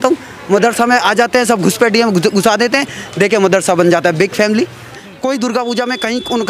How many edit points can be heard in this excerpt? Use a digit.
1